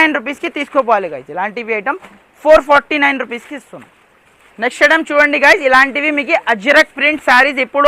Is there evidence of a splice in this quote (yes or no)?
no